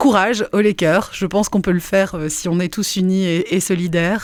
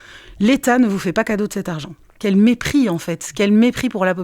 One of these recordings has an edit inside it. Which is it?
second; 1 cut; at 2.2 s

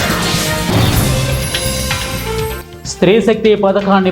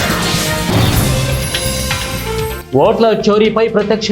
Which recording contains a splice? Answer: second; 1 cut; at 2.6 s

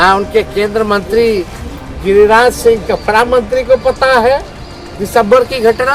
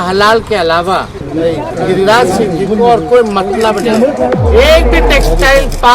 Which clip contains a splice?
second; 2 cuts; at 1.2 s, 4.4 s

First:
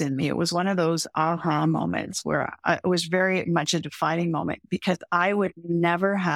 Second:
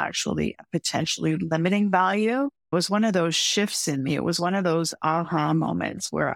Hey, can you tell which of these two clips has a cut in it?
second; 1 cut; at 2.7 s

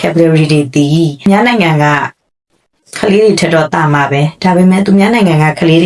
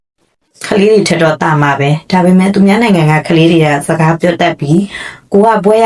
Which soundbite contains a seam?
first; 1 cut; at 1.3 s

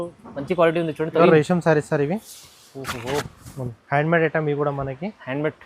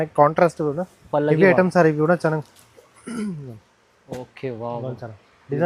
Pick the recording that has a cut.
first; 1 cut; at 1.2 s

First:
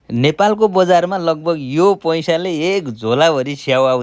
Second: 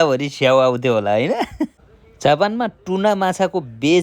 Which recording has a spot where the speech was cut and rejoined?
second; 1 cut; at 1.7 s

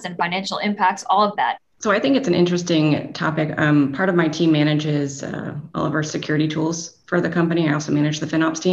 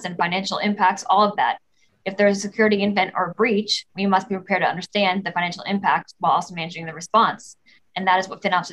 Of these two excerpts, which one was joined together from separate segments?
first; 1 cut; at 1.7 s

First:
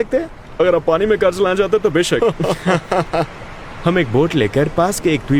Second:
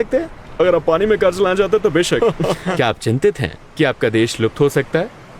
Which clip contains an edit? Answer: second; 1 cut; at 2.7 s

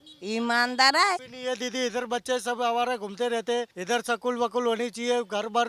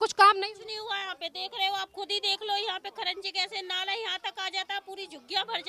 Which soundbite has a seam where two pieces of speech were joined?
first; 2 cuts; at 1.3 s, 3.7 s

